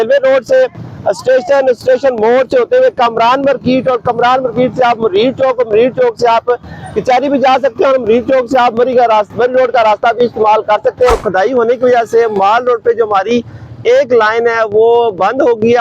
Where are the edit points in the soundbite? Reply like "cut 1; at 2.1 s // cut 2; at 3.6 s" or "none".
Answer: cut 1; at 11.1 s

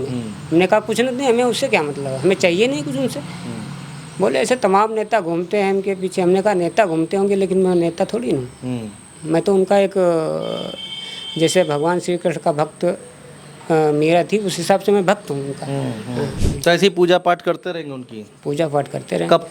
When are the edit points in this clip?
cut 1; at 16.4 s

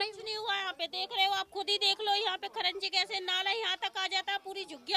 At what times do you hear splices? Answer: none

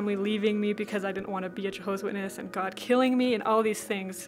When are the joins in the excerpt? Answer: none

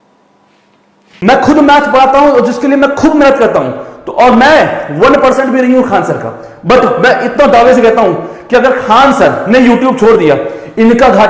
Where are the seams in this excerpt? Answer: none

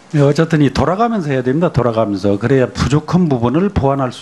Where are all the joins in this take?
cut 1; at 2.4 s

